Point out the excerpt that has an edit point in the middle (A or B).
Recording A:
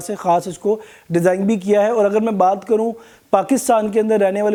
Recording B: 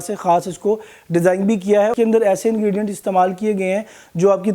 B